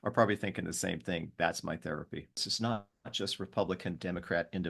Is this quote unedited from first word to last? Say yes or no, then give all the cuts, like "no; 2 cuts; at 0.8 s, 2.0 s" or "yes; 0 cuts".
no; 1 cut; at 2.4 s